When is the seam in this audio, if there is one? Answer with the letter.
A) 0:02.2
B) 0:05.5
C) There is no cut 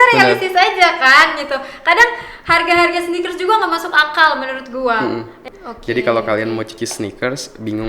B